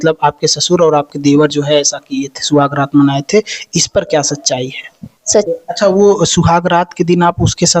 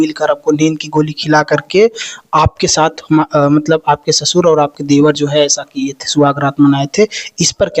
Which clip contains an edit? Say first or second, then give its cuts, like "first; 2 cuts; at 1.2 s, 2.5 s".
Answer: first; 1 cut; at 5.5 s